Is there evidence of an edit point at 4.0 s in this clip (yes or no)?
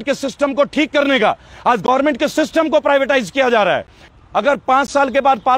yes